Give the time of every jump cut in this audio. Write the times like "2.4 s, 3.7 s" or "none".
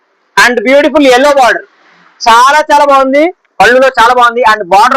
3.4 s